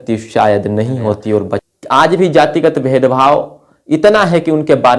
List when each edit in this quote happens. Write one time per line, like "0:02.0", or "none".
0:01.6